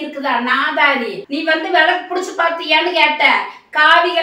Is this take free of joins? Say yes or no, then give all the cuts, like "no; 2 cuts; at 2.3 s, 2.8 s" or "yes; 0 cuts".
no; 1 cut; at 1.2 s